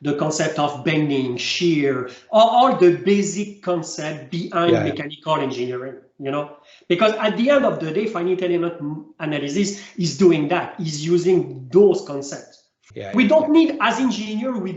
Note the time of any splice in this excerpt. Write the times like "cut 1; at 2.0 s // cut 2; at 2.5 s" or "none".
cut 1; at 12.9 s